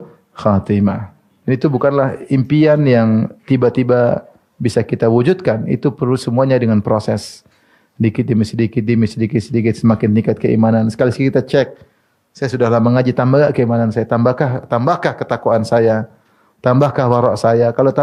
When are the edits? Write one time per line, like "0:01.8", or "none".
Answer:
none